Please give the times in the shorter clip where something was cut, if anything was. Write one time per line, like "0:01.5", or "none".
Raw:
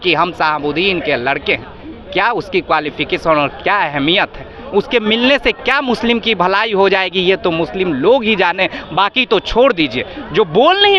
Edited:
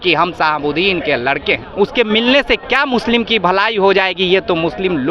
0:01.7